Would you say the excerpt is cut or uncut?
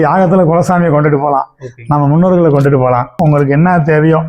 cut